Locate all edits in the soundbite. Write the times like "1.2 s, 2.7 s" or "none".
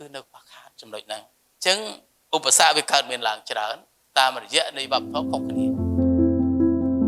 1.4 s, 5.1 s